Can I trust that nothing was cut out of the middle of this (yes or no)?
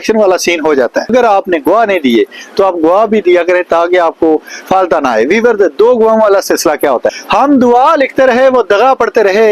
no